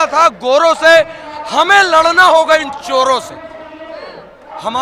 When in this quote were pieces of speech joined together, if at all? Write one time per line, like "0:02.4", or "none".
none

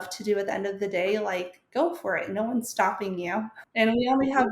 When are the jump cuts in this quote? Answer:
0:03.6

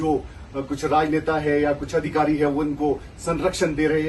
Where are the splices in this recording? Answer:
none

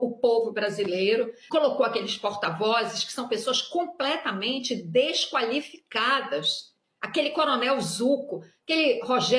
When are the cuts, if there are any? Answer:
0:01.4

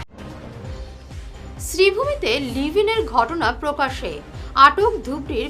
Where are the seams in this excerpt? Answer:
0:01.0

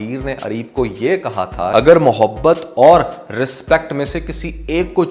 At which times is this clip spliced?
0:01.7

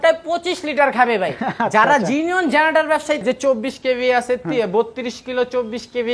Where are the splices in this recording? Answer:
0:03.2

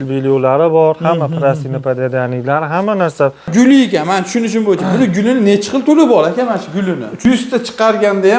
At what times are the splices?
0:03.5
0:07.1

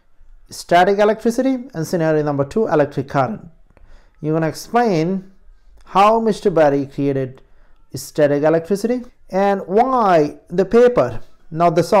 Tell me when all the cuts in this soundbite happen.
0:09.1

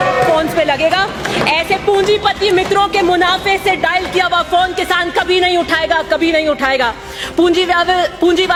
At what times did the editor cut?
none

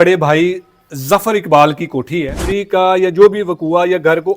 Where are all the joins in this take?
0:02.5

